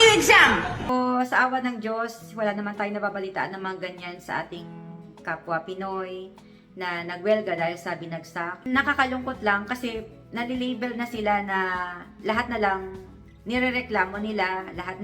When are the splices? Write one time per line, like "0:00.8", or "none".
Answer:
0:00.9
0:08.7